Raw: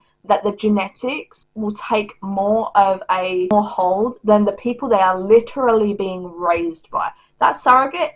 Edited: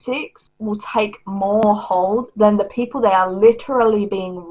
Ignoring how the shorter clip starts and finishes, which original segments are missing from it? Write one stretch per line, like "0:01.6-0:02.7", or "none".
0:02.6-0:03.5